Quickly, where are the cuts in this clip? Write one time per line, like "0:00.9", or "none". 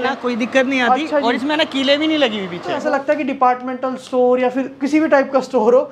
0:02.8

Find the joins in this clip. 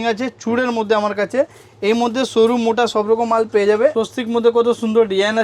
0:03.9

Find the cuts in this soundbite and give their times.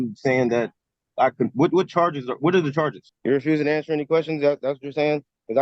0:03.1

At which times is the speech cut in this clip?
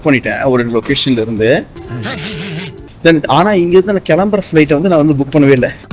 none

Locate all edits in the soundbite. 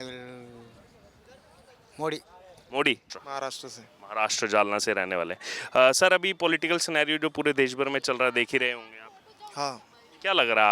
0:03.2

